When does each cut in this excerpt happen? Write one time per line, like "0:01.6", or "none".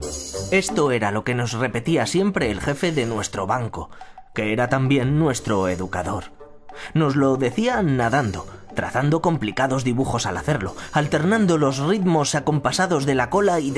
0:01.0